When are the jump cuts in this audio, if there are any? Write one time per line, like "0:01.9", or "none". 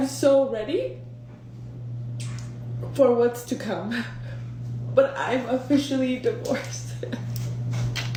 none